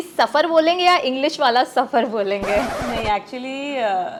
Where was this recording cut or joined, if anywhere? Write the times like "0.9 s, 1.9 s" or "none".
none